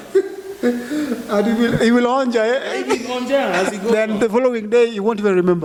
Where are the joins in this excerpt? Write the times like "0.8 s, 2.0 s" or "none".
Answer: none